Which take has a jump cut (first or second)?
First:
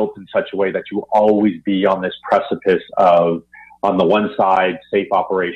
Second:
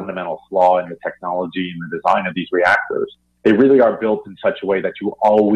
second